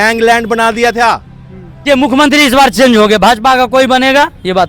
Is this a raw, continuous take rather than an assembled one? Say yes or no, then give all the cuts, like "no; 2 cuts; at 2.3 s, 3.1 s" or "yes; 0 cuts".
no; 1 cut; at 1.8 s